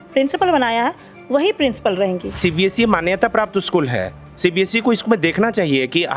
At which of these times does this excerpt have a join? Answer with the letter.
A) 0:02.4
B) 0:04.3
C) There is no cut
A